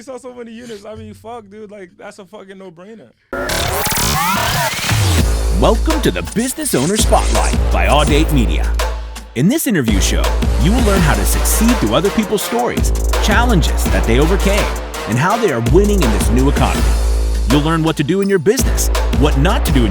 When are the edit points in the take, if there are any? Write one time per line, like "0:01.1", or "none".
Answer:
0:03.1